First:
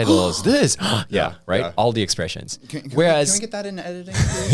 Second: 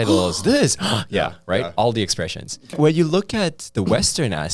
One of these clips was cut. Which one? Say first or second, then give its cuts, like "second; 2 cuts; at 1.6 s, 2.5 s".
second; 1 cut; at 2.7 s